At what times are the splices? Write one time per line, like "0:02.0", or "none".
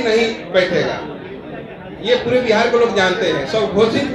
none